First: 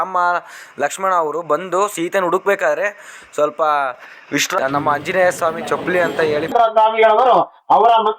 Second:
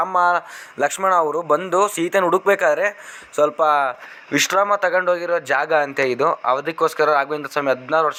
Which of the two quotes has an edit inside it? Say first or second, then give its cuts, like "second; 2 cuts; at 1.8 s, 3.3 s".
first; 2 cuts; at 4.5 s, 6.5 s